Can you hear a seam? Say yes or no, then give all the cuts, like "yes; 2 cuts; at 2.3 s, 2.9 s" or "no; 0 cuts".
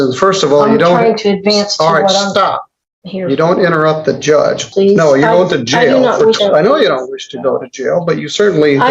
yes; 2 cuts; at 4.7 s, 6.4 s